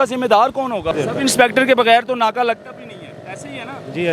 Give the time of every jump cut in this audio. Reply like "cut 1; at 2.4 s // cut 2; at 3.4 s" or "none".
cut 1; at 0.9 s